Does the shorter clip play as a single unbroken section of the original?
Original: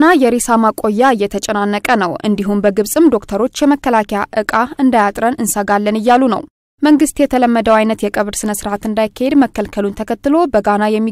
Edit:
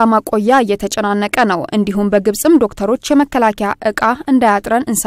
yes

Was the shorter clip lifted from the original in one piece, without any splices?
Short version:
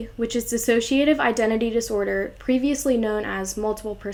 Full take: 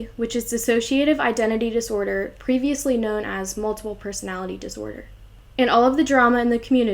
yes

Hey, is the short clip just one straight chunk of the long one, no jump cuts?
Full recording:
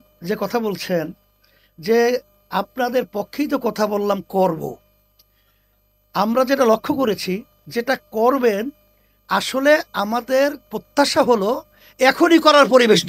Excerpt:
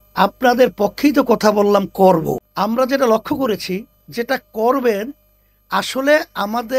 no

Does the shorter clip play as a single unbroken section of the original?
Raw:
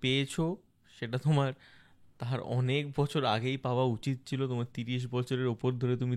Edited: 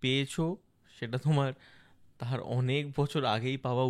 yes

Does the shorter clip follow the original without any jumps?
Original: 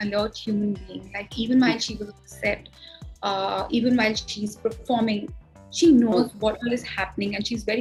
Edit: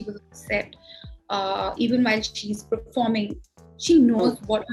yes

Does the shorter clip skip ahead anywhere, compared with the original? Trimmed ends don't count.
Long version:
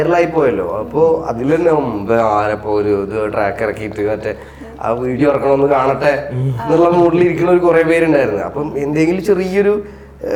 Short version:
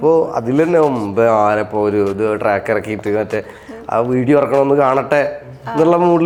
no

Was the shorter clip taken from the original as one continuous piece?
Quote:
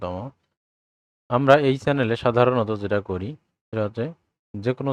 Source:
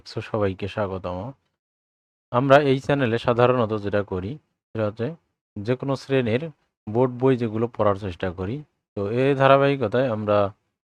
yes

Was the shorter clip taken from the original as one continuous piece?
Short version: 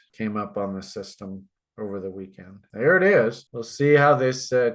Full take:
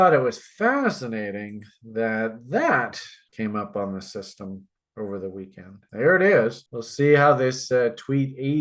yes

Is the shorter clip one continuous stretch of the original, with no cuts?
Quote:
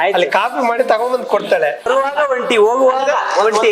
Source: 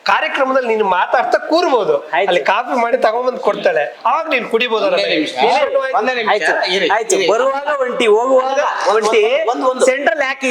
no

